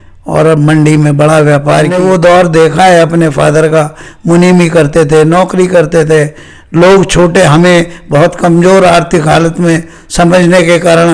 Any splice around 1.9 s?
yes; 1 cut; at 1.9 s

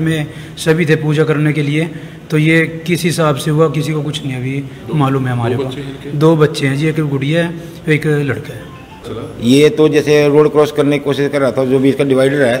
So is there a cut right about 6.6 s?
no; 1 cut; at 9.1 s

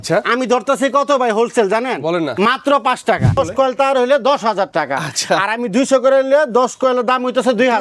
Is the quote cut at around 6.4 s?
no; 1 cut; at 3.4 s

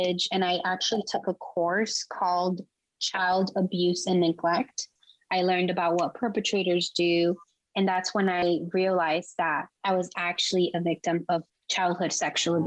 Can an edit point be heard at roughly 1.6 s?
no; 3 cuts; at 5.0 s, 9.7 s, 11.6 s

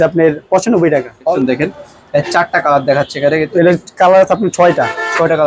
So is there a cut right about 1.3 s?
yes; 1 cut; at 1.3 s

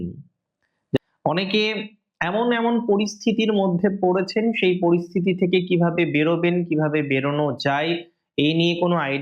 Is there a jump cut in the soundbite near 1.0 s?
yes; 1 cut; at 1.0 s

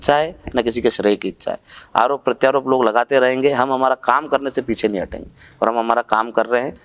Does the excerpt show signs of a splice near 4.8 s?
no; 0 cuts

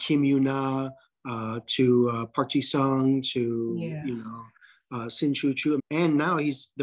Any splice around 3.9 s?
no; 1 cut; at 5.8 s

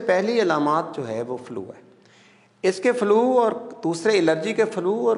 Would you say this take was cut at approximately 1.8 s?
no; 0 cuts

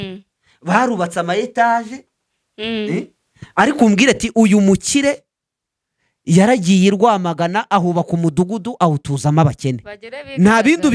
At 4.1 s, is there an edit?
no; 0 cuts

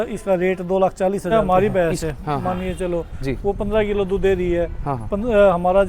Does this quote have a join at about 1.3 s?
yes; 1 cut; at 1.3 s

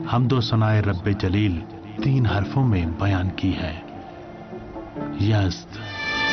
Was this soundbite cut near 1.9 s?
no; 0 cuts

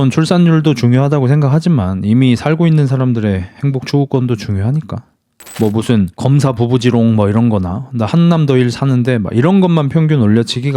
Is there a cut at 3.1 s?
no; 1 cut; at 5.1 s

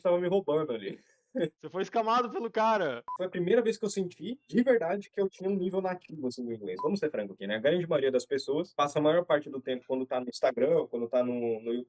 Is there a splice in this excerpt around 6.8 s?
yes; 2 cuts; at 3.0 s, 6.8 s

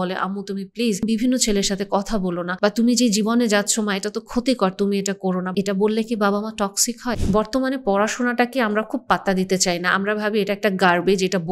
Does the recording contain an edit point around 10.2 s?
no; 4 cuts; at 1.0 s, 2.5 s, 5.5 s, 7.1 s

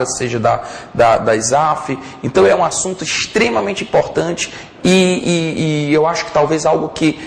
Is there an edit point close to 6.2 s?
yes; 1 cut; at 6.2 s

